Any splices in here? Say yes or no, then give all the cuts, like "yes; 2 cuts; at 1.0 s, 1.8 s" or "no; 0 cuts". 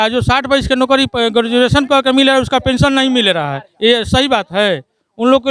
no; 0 cuts